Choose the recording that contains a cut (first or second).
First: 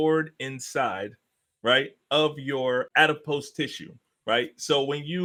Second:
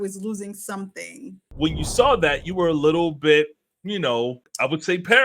second